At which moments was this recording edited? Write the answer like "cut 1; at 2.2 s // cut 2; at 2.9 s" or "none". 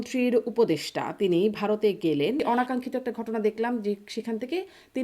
cut 1; at 2.4 s